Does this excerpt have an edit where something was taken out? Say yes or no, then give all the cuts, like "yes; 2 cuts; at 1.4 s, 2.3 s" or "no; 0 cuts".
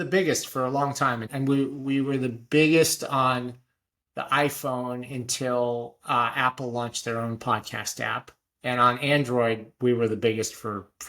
yes; 1 cut; at 1.3 s